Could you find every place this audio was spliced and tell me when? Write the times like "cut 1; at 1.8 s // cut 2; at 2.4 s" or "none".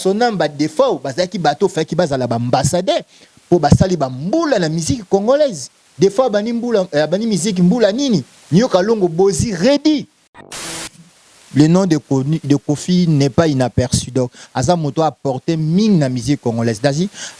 cut 1; at 10.7 s